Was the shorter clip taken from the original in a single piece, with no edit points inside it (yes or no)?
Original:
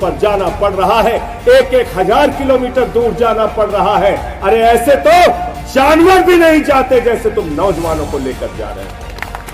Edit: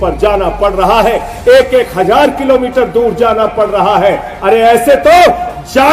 yes